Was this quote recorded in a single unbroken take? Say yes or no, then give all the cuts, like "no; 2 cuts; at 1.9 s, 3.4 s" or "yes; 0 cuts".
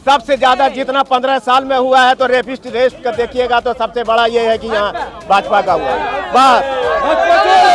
yes; 0 cuts